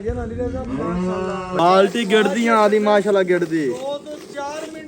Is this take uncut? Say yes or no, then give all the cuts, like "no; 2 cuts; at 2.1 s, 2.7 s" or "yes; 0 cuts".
no; 1 cut; at 1.6 s